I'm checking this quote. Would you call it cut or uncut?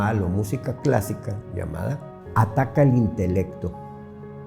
cut